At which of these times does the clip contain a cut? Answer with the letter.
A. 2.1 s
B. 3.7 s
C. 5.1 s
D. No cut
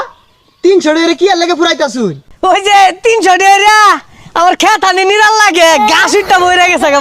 A